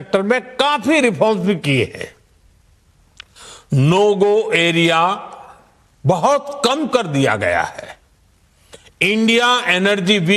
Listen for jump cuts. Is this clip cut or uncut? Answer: cut